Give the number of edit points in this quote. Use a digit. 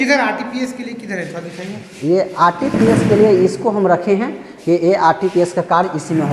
0